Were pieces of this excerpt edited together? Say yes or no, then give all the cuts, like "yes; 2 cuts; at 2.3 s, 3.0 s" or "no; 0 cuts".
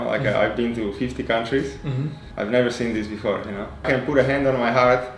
yes; 2 cuts; at 2.2 s, 3.7 s